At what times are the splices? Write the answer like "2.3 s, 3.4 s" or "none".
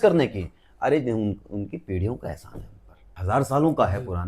3.2 s